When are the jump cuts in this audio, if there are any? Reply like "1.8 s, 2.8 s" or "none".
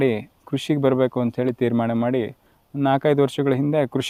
none